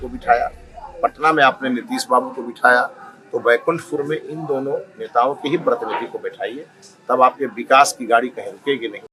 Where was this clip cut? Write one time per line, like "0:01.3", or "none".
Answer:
none